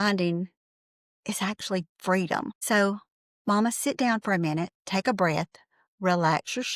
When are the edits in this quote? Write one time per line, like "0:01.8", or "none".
none